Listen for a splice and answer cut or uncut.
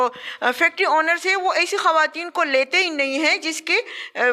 uncut